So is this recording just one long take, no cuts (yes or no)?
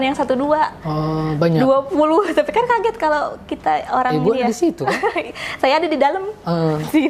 yes